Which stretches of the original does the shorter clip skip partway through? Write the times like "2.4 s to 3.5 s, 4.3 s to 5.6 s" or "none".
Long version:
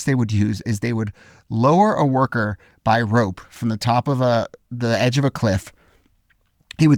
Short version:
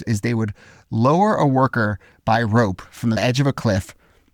3.8 s to 5.0 s